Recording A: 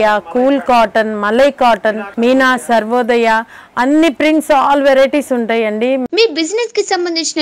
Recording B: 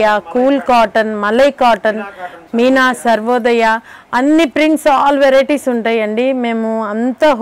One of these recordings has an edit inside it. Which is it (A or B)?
A